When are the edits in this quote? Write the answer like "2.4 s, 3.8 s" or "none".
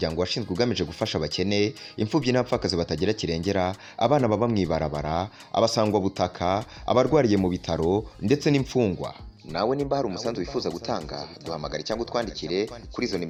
none